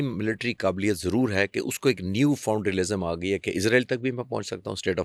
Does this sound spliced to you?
no; 0 cuts

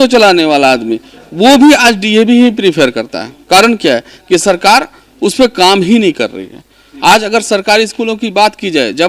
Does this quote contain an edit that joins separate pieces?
no; 0 cuts

